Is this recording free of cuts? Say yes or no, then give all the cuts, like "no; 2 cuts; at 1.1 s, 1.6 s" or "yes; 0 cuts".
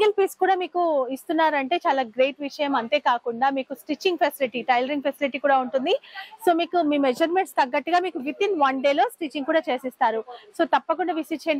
yes; 0 cuts